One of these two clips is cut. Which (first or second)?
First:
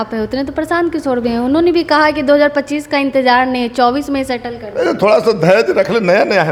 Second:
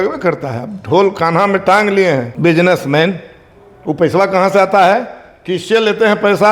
second